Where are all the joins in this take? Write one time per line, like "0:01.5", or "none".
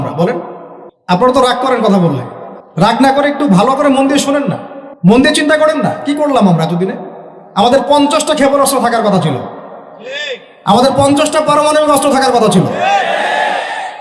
0:01.2
0:03.0
0:05.1